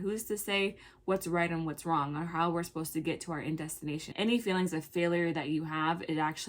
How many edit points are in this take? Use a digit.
1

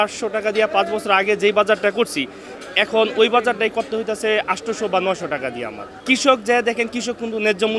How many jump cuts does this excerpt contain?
0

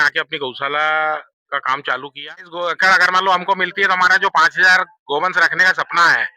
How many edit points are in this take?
1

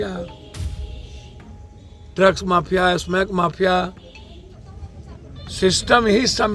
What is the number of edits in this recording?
1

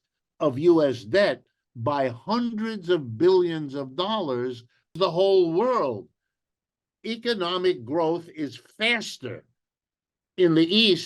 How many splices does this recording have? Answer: 1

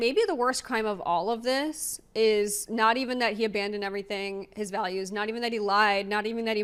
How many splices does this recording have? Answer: 0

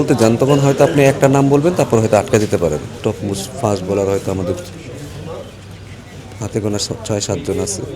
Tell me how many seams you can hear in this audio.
1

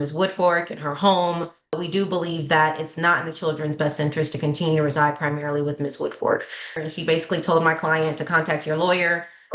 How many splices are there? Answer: 2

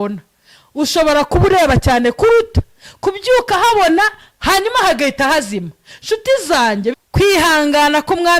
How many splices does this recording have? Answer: 1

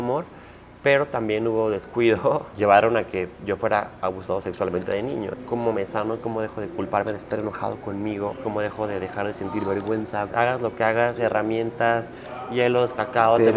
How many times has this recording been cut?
4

